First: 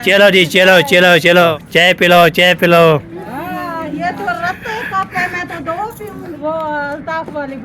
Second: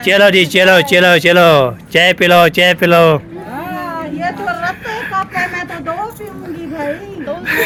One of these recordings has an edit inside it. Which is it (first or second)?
first